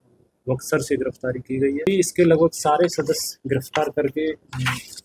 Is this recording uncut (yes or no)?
no